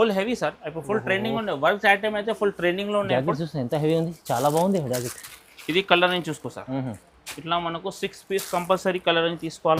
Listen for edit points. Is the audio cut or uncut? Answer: uncut